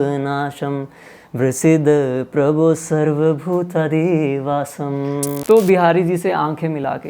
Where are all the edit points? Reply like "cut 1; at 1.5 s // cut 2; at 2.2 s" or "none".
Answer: cut 1; at 5.4 s